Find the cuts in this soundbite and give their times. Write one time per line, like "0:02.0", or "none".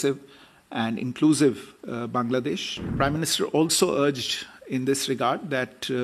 0:02.9